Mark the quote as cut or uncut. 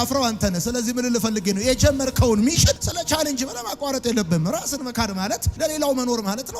uncut